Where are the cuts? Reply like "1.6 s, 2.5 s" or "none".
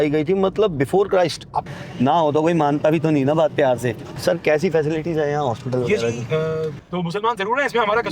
1.6 s, 4.1 s, 6.8 s